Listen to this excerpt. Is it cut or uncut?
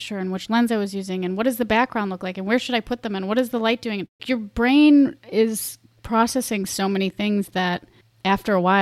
cut